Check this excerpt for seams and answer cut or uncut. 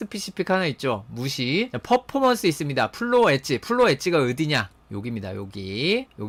uncut